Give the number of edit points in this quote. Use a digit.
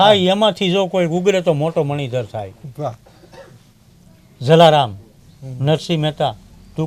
0